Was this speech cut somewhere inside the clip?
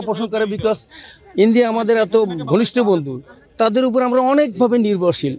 no; 0 cuts

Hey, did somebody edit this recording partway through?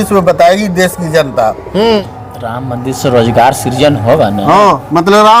yes; 1 cut; at 2.1 s

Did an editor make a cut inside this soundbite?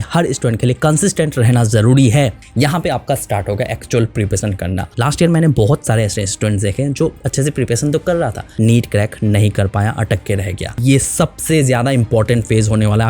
yes; 4 cuts; at 2.4 s, 4.9 s, 8.4 s, 10.7 s

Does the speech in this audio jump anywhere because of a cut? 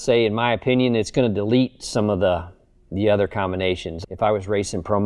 yes; 2 cuts; at 1.1 s, 3.9 s

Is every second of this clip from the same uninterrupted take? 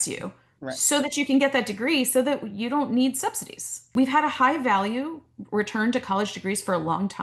no; 1 cut; at 3.8 s

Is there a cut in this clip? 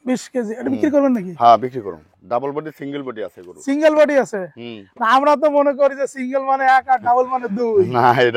yes; 1 cut; at 2.0 s

